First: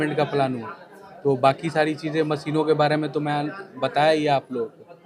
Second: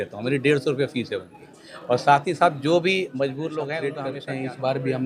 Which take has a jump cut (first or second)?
second